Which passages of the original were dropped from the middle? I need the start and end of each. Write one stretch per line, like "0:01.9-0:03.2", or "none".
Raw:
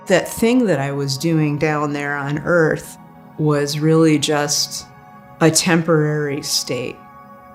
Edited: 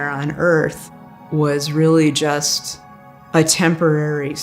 none